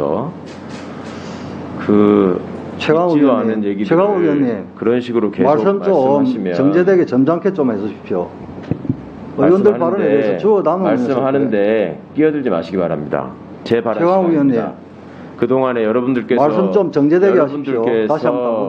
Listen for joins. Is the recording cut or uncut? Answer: uncut